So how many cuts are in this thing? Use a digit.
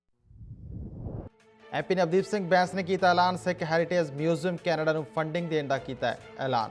0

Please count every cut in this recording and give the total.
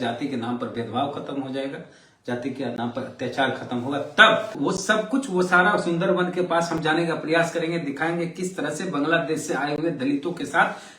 1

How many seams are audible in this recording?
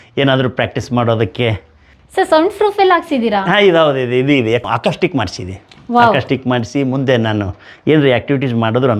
0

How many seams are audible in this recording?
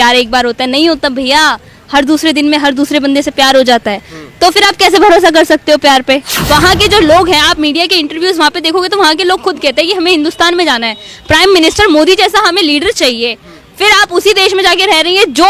1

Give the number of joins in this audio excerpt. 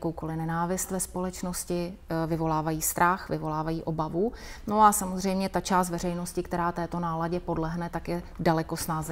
0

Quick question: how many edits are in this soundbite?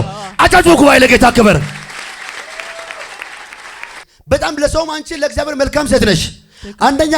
1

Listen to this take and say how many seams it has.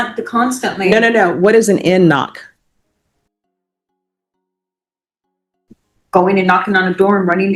0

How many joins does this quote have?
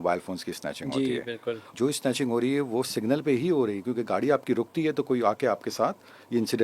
1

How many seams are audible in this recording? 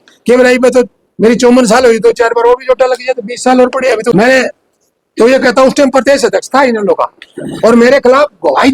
1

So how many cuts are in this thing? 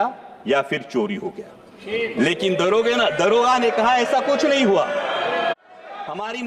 1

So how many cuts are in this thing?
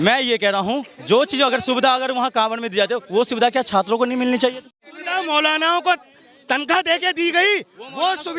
1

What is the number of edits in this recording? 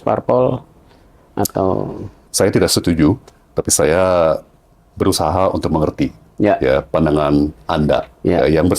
1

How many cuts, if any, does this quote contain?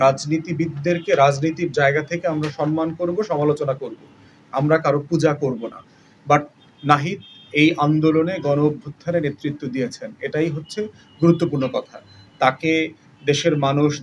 1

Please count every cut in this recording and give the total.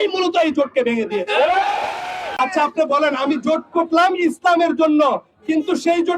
1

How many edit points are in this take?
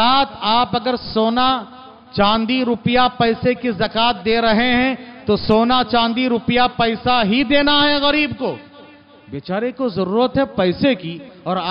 0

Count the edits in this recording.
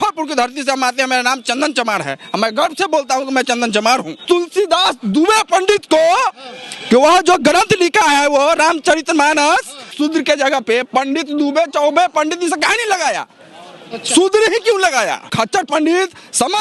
3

